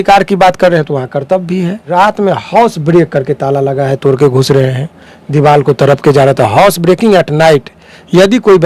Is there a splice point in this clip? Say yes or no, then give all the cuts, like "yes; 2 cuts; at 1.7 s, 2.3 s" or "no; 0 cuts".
yes; 1 cut; at 1.9 s